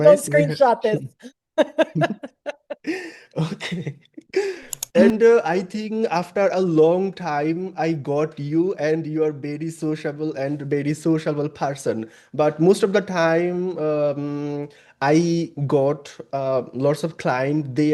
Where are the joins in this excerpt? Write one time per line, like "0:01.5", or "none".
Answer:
0:04.7